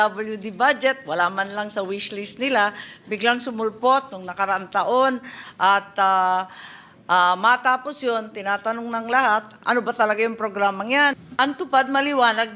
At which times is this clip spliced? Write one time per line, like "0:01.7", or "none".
0:11.2